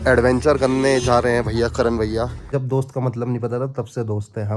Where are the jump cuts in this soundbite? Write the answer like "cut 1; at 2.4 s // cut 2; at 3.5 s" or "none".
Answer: cut 1; at 2.5 s